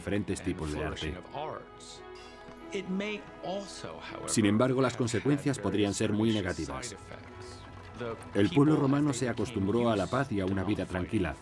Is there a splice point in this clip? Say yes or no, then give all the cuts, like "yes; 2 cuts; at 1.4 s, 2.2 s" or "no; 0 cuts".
yes; 1 cut; at 5.4 s